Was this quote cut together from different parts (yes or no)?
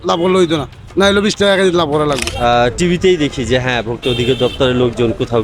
yes